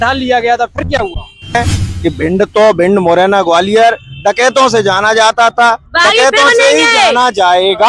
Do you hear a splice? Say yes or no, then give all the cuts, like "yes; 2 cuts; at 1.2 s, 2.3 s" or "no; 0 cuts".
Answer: yes; 1 cut; at 1.6 s